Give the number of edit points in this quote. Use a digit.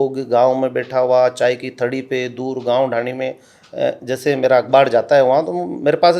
0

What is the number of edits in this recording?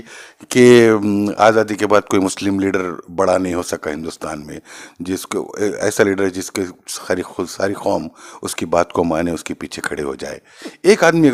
0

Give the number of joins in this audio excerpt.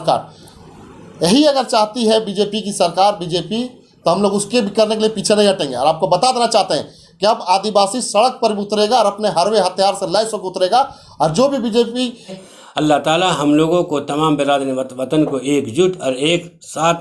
1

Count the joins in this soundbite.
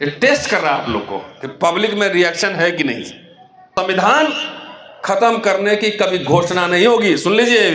1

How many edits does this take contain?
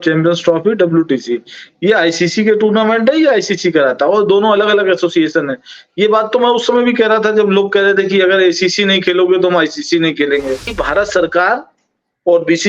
1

